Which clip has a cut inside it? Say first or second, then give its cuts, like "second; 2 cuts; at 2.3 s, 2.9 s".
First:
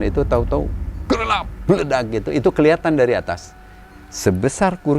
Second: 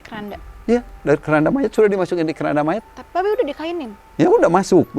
second; 1 cut; at 2.8 s